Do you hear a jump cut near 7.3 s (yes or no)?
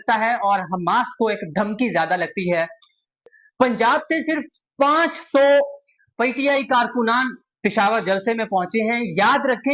no